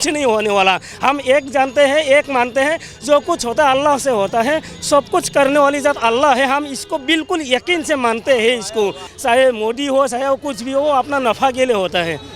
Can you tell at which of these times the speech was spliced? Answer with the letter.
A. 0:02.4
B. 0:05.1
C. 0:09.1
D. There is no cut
C